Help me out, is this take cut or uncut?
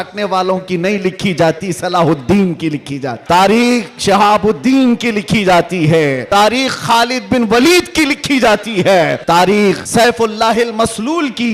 cut